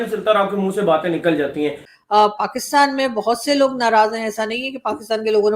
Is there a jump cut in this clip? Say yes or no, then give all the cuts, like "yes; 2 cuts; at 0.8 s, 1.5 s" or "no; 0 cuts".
yes; 1 cut; at 1.9 s